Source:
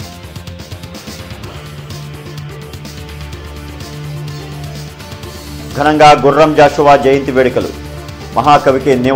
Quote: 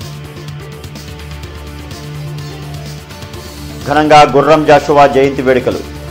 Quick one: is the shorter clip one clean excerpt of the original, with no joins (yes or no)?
yes